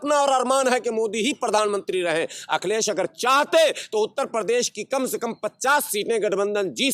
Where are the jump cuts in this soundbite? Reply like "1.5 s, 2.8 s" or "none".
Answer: none

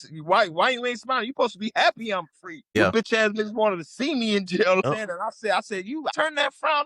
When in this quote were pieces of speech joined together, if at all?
2.7 s, 4.9 s, 6.1 s

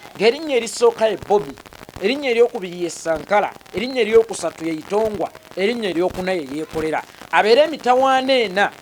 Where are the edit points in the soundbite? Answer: none

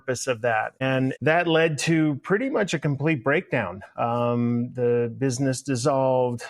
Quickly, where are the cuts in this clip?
1.0 s

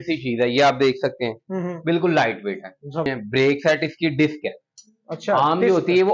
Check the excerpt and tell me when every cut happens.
3.1 s

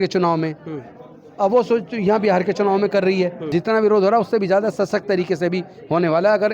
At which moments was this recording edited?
3.4 s

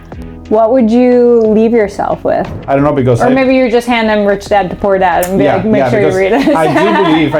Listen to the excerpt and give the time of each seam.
2.6 s

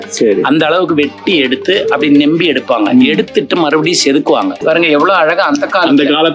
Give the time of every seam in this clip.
4.6 s

